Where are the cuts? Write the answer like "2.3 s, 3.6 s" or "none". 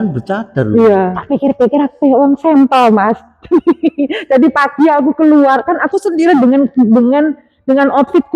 1.2 s